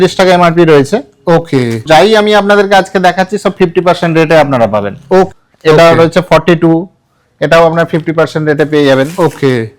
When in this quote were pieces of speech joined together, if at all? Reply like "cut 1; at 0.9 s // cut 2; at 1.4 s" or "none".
cut 1; at 1.8 s // cut 2; at 5.3 s